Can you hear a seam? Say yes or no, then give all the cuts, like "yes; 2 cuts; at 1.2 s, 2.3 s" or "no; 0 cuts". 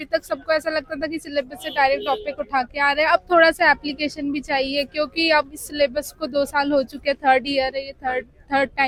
no; 0 cuts